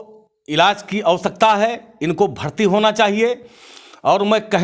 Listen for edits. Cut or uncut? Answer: uncut